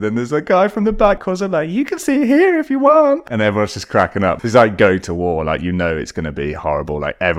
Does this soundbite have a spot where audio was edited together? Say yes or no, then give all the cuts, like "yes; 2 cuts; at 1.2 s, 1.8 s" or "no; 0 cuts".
yes; 3 cuts; at 1.2 s, 3.2 s, 4.4 s